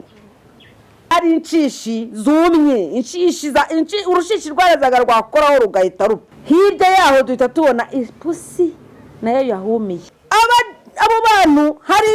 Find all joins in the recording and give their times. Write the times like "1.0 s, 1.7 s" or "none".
1.1 s, 6.3 s, 9.9 s

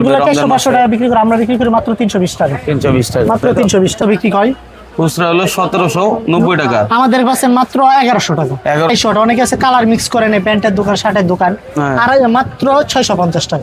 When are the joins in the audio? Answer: 4.0 s, 8.9 s

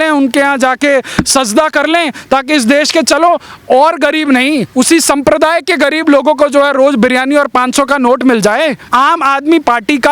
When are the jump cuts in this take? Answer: 8.8 s

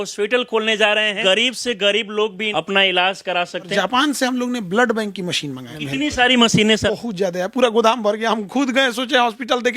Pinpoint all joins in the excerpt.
1.2 s, 2.4 s, 3.7 s, 5.7 s, 6.8 s

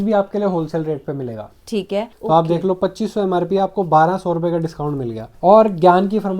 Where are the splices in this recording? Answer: 2.1 s, 5.3 s

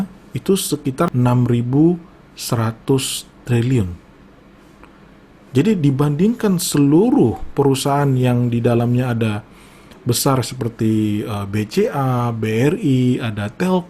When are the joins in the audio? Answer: 1.1 s

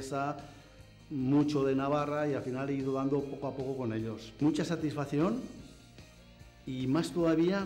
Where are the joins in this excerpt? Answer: none

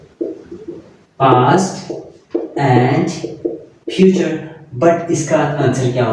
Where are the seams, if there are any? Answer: none

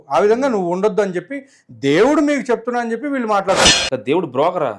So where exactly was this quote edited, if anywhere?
3.6 s

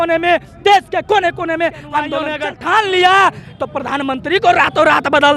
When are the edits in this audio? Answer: 2.2 s

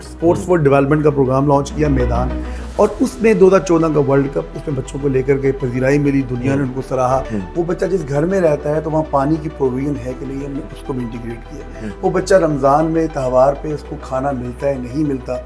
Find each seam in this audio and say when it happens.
7.3 s

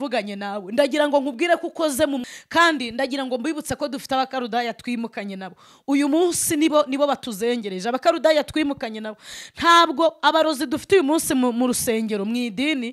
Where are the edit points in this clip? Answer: 2.3 s

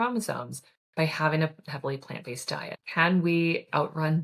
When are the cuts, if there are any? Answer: 2.8 s

